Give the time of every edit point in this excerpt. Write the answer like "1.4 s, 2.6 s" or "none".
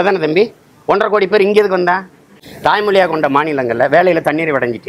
2.4 s

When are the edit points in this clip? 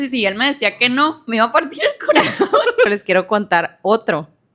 2.9 s

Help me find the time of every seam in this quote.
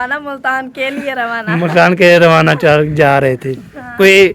none

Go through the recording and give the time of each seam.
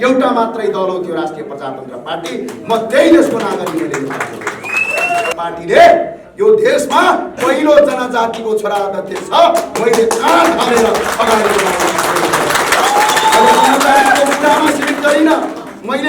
5.3 s

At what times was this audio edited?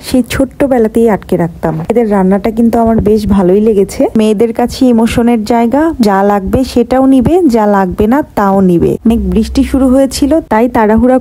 1.9 s, 4.2 s, 6.0 s, 9.1 s

